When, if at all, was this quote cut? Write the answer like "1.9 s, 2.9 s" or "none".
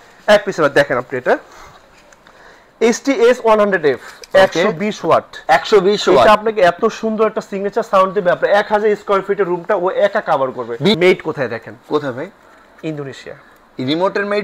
11.0 s

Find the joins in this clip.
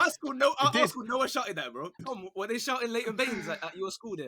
2.0 s

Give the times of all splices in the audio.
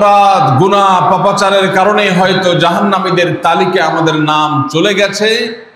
none

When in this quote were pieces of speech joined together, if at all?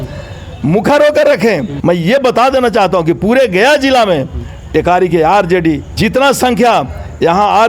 1.7 s, 5.9 s

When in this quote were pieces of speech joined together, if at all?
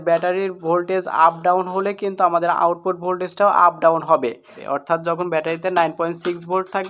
4.6 s

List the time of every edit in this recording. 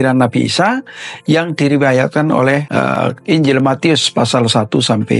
2.8 s

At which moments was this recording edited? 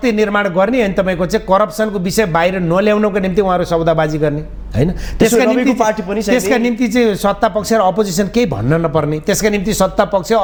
none

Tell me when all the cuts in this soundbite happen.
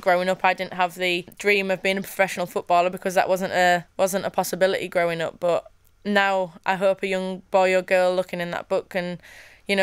1.3 s

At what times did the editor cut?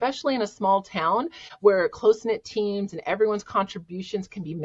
1.4 s

